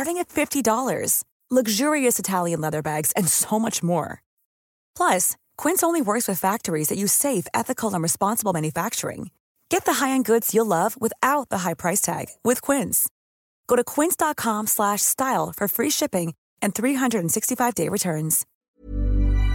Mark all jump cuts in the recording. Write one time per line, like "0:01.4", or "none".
0:18.5